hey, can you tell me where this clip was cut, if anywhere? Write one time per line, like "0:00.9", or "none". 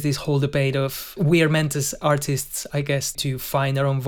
0:01.1
0:03.2